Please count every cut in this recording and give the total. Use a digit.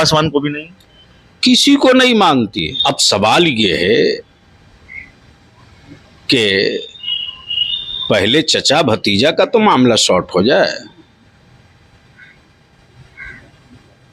1